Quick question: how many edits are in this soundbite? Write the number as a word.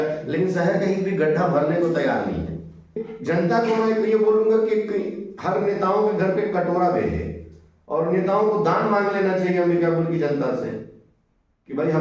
one